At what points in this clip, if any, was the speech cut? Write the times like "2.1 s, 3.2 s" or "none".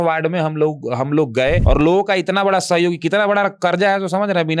1.6 s